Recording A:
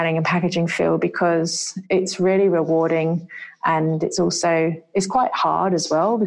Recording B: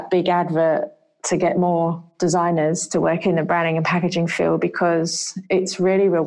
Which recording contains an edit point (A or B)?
B